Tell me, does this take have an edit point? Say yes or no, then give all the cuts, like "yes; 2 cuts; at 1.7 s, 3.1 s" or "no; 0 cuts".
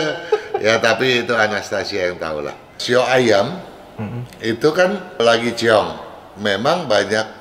yes; 2 cuts; at 2.8 s, 5.2 s